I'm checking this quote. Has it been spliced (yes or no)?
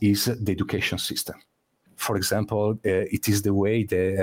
yes